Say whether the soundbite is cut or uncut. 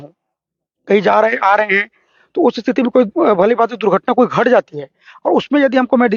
uncut